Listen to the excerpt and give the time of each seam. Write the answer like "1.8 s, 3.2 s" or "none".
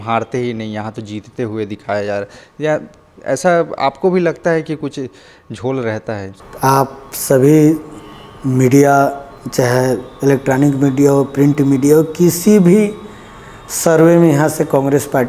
6.4 s